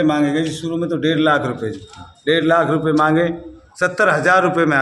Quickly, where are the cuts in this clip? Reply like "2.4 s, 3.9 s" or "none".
3.6 s

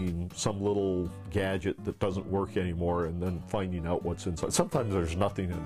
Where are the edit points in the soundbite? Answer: none

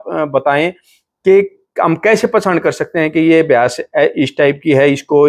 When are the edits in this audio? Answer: none

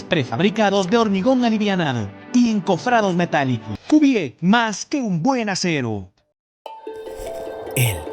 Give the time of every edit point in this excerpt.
3.7 s, 6.4 s

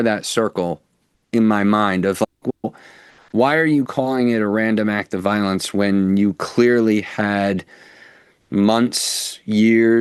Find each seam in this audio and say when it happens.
none

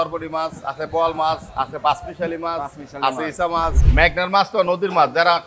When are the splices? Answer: 3.8 s

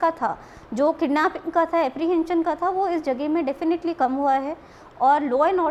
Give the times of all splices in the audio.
none

